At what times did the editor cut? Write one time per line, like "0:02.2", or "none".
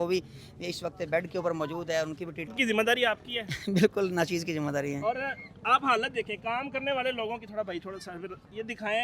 0:02.5